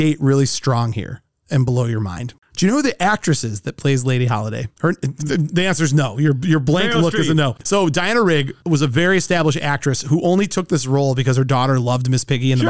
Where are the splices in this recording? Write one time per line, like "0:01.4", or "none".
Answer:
0:02.3
0:07.6